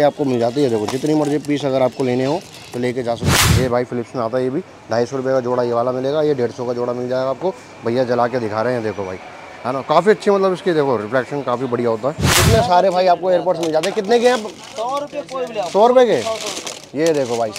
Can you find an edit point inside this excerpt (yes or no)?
yes